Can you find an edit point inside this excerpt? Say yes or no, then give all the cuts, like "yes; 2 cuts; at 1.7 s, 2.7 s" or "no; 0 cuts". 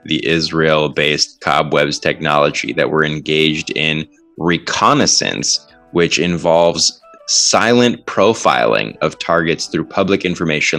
no; 0 cuts